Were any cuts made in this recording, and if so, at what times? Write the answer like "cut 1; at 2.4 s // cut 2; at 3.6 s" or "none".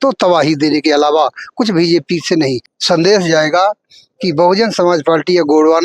cut 1; at 2.7 s